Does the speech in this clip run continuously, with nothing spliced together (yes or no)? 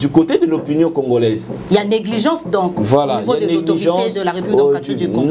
yes